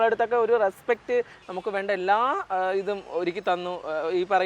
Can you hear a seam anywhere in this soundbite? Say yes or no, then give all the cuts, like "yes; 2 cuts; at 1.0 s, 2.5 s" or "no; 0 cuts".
yes; 1 cut; at 1.4 s